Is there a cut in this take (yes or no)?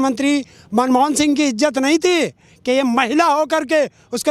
no